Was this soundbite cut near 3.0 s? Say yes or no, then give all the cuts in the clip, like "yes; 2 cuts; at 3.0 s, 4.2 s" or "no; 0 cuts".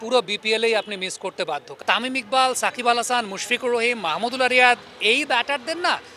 no; 1 cut; at 1.8 s